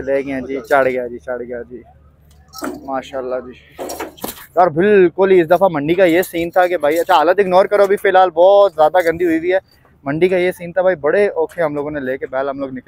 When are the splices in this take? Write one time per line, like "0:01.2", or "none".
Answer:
0:04.2